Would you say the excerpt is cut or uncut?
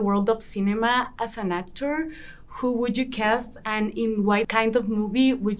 cut